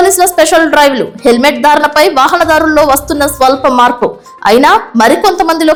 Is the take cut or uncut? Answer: uncut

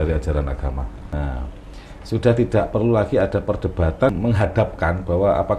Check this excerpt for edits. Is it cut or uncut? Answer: cut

